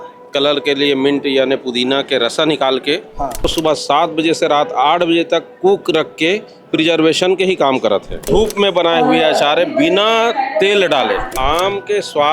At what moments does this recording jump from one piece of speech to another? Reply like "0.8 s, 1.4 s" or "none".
3.5 s, 8.3 s, 11.3 s